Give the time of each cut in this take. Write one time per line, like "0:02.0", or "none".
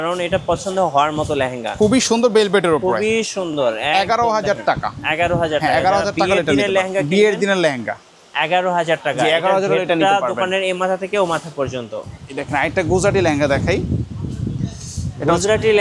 none